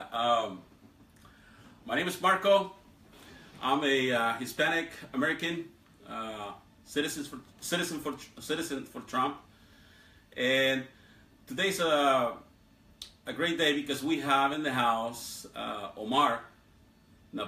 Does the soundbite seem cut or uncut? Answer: uncut